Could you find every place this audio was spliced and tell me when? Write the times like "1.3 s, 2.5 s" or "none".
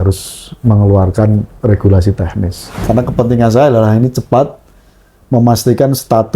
2.6 s